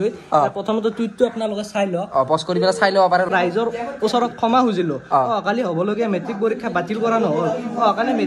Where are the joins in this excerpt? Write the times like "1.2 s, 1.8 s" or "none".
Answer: 3.3 s